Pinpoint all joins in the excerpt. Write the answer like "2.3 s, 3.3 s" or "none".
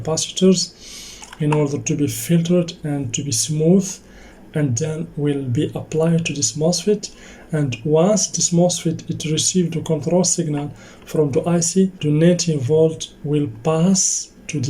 12.0 s